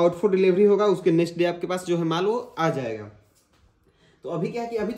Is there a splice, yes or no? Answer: no